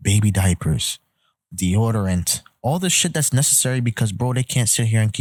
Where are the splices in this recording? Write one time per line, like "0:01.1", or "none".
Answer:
none